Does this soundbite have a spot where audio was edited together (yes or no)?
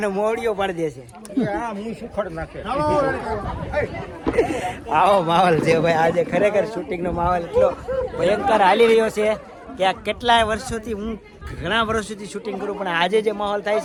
no